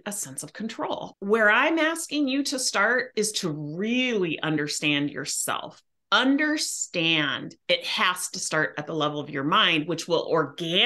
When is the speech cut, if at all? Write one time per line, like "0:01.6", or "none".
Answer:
0:01.1
0:07.5